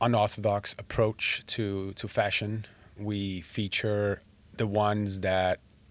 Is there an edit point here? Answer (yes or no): yes